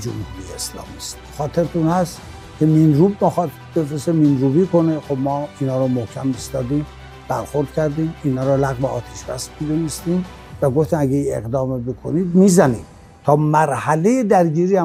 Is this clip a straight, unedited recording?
yes; 0 cuts

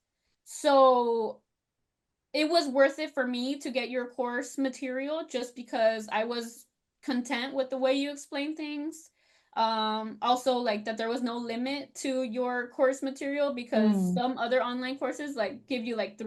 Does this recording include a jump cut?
no; 0 cuts

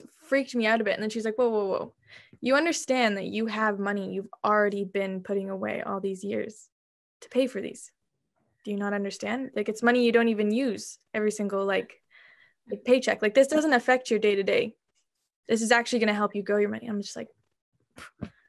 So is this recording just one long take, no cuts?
yes; 0 cuts

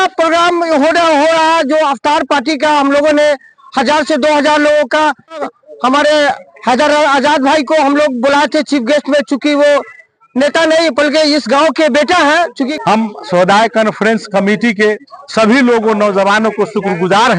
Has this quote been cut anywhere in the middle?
yes; 2 cuts; at 5.4 s, 12.7 s

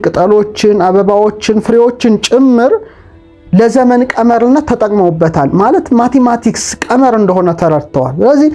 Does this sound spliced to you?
no; 0 cuts

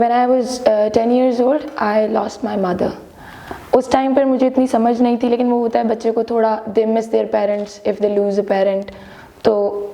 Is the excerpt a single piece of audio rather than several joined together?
yes; 0 cuts

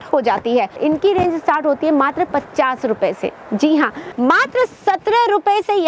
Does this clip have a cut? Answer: yes; 2 cuts; at 0.8 s, 4.0 s

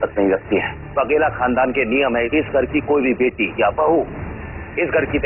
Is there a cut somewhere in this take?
yes; 2 cuts; at 0.8 s, 2.3 s

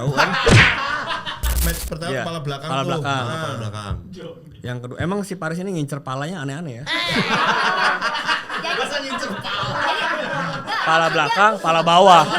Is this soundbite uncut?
no; 1 cut; at 1.6 s

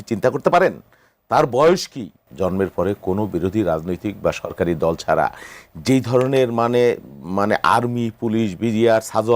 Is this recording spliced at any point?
yes; 1 cut; at 2.2 s

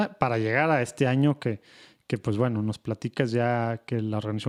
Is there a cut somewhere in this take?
no; 0 cuts

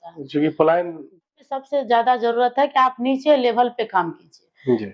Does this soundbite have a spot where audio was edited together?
yes; 1 cut; at 1.2 s

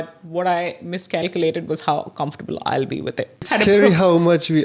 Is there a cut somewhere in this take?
yes; 1 cut; at 3.4 s

